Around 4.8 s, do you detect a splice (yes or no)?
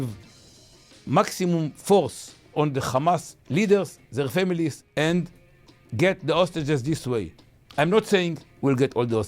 yes